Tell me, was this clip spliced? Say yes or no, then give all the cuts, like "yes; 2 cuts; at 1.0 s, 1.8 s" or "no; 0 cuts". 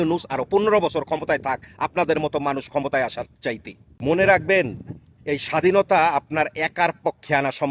yes; 1 cut; at 3.9 s